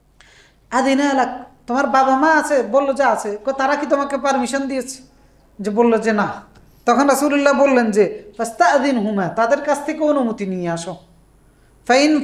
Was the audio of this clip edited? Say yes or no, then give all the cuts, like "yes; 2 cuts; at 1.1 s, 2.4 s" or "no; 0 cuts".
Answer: no; 0 cuts